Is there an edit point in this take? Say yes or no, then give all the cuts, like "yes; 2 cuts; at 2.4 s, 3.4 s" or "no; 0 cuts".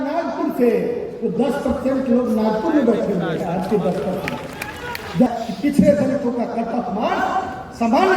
yes; 1 cut; at 5.3 s